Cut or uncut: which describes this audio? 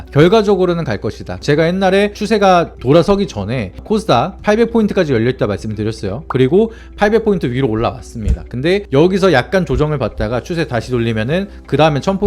cut